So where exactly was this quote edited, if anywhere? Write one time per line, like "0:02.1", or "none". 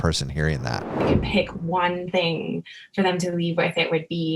0:01.1

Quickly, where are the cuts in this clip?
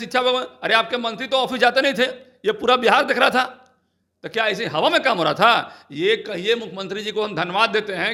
none

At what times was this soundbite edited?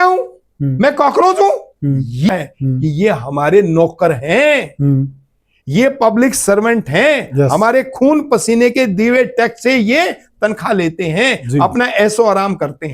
0:02.3

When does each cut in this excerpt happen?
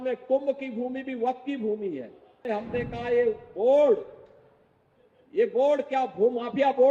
0:02.5

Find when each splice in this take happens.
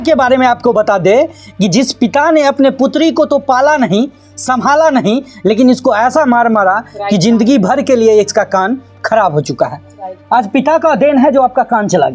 none

